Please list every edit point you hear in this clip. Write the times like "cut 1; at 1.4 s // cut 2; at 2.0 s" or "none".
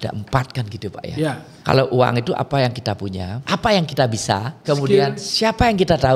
cut 1; at 1.5 s // cut 2; at 3.3 s // cut 3; at 4.6 s